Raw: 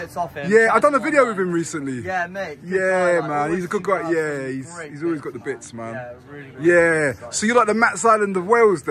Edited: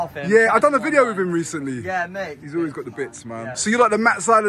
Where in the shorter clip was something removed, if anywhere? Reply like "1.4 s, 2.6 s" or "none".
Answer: 2.3 s, 3.5 s